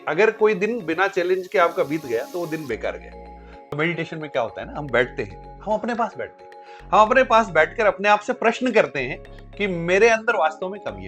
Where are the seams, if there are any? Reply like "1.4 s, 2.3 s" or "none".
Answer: 3.6 s